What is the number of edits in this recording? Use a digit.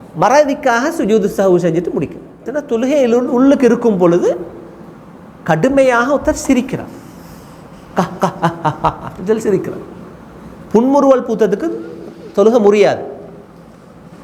1